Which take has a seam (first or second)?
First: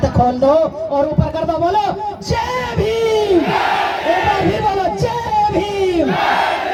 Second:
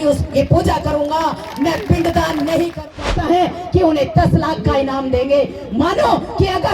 second